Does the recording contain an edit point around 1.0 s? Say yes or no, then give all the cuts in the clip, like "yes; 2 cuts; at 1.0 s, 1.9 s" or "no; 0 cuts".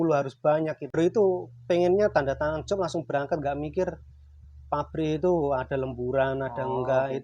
yes; 1 cut; at 1.0 s